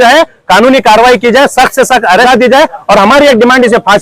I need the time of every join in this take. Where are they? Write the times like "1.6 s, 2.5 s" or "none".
2.3 s

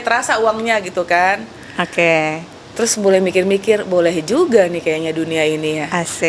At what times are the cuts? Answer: none

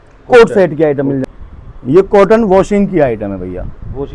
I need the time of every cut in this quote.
1.2 s

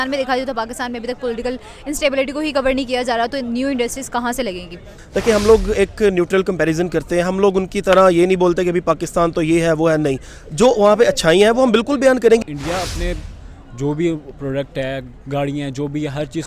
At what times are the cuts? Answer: 5.0 s, 12.4 s

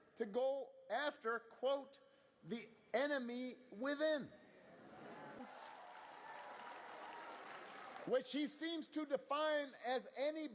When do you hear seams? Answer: 5.4 s

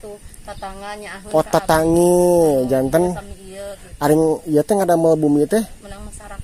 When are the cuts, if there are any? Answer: none

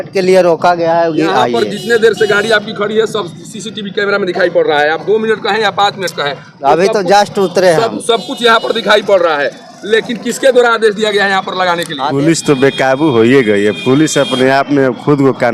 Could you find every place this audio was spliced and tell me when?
12.0 s

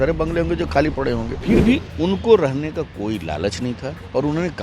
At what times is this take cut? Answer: 1.3 s

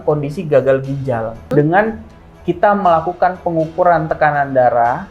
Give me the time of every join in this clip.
1.5 s

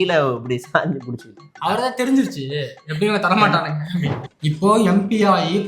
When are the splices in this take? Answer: 4.2 s

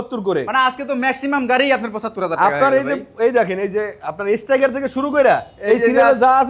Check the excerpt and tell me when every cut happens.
none

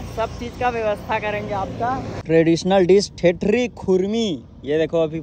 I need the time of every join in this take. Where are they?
2.1 s

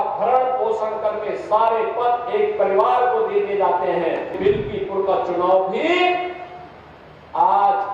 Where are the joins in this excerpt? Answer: 4.4 s

